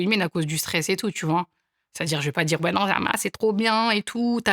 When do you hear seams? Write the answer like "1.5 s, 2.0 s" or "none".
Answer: none

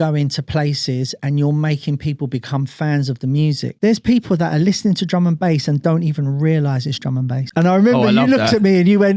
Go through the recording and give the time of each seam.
3.7 s, 7.4 s

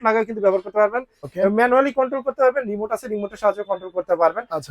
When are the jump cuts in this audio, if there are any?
1.2 s

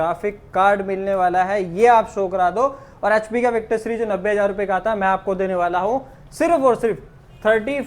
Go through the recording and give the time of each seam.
none

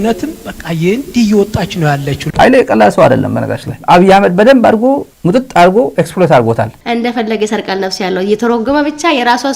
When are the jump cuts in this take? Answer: 3.8 s, 6.7 s

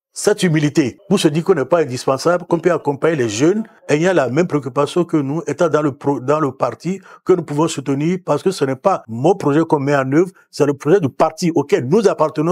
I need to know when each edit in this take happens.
1.0 s, 3.7 s, 9.1 s

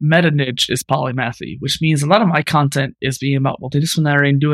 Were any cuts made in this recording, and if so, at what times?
none

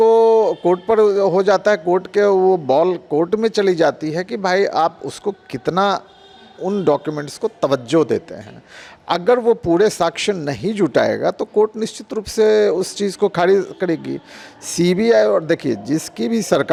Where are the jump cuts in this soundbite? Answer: none

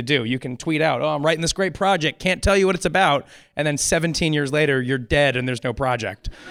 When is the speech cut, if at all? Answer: none

